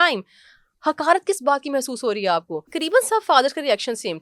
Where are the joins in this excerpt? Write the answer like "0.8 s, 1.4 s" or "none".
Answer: 2.6 s